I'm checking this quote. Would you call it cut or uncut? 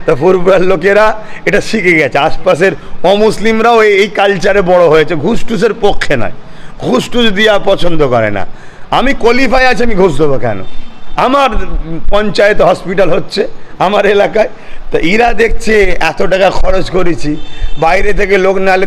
uncut